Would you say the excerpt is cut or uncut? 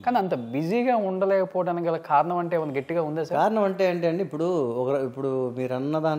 uncut